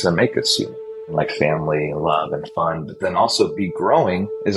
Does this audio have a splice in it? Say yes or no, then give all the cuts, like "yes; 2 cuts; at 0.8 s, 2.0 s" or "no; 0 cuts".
yes; 1 cut; at 1.0 s